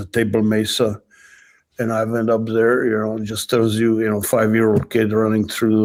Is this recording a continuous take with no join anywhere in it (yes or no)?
yes